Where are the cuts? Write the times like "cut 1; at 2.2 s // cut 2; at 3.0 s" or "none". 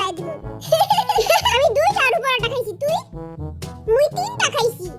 cut 1; at 1.5 s

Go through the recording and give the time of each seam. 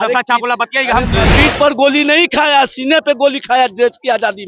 cut 1; at 1.3 s

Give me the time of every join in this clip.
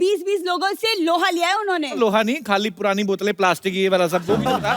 cut 1; at 2.0 s

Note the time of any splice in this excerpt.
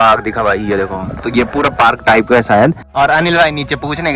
cut 1; at 2.8 s

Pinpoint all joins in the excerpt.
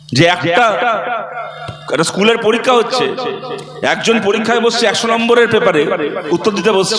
none

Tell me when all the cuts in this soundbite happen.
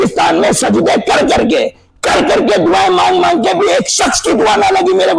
none

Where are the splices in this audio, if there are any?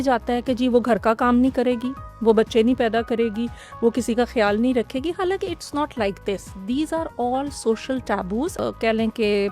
cut 1; at 8.5 s

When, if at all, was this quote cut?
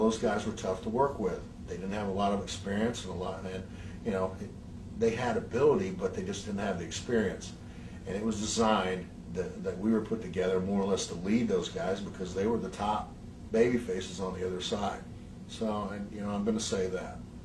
none

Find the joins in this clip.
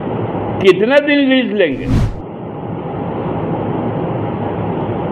cut 1; at 2.0 s

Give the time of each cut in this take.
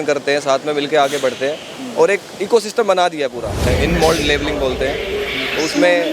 cut 1; at 3.7 s

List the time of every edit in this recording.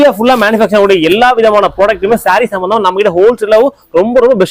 none

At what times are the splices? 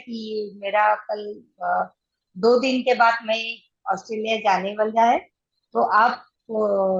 none

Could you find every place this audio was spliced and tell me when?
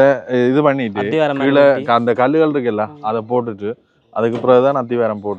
none

